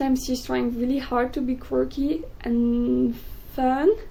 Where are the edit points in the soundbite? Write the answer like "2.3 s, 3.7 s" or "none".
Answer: none